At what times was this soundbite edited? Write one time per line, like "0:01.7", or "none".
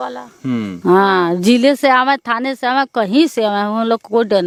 none